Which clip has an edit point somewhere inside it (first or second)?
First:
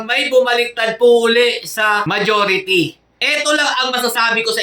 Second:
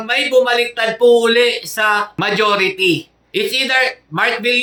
first